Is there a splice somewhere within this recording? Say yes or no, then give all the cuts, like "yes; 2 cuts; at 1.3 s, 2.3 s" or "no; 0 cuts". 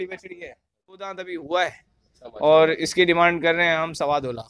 yes; 1 cut; at 1.2 s